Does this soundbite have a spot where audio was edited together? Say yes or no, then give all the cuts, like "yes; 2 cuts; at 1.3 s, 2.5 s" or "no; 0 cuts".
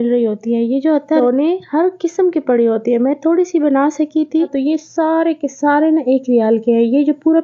yes; 2 cuts; at 1.2 s, 4.5 s